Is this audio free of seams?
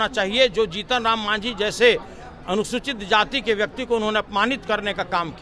yes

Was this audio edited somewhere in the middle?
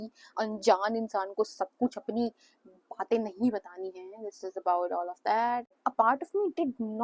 yes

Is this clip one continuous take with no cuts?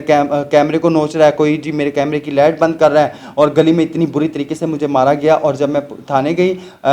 yes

